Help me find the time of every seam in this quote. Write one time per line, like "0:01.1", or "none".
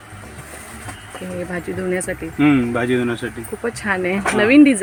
none